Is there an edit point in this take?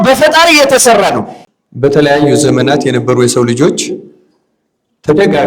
yes; 1 cut; at 1.3 s

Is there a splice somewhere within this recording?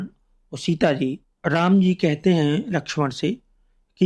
yes; 1 cut; at 1.3 s

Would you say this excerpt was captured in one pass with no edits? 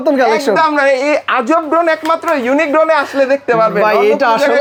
yes; 0 cuts

